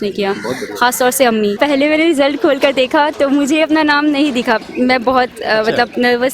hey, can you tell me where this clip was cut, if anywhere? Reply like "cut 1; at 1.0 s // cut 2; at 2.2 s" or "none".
cut 1; at 1.6 s

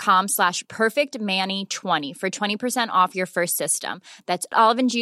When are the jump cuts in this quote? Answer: cut 1; at 2.0 s

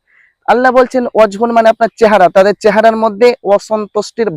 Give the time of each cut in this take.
none

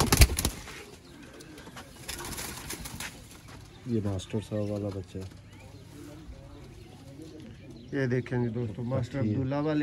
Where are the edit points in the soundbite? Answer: none

